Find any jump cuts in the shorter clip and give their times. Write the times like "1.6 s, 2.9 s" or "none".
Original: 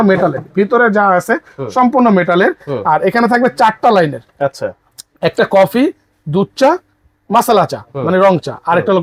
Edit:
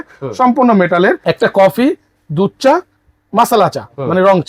1.2 s